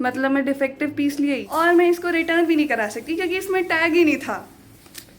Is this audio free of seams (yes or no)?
no